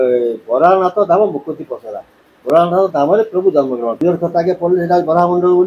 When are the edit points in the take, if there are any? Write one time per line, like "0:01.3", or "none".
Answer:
0:04.0